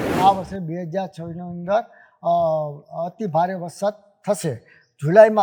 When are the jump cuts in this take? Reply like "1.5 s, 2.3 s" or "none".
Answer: none